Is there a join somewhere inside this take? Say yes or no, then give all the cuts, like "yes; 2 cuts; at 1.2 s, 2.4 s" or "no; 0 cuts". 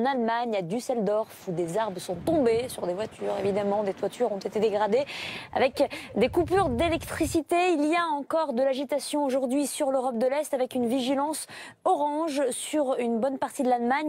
no; 0 cuts